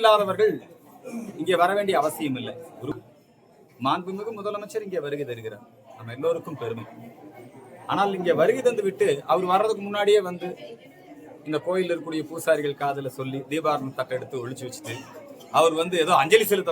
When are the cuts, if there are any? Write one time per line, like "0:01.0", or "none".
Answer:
0:02.9